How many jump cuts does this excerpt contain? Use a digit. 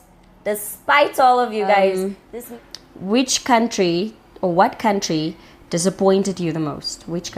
1